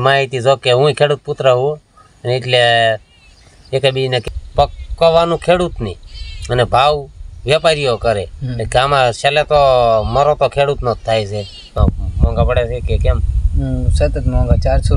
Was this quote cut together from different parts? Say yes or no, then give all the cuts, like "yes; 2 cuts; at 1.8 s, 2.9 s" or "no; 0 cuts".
yes; 2 cuts; at 4.2 s, 11.8 s